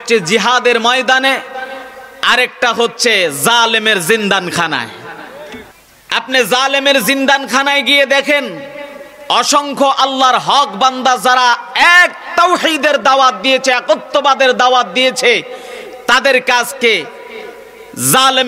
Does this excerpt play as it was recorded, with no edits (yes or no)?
no